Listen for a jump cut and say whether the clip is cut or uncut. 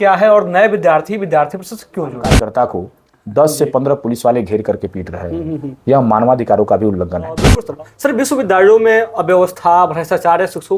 cut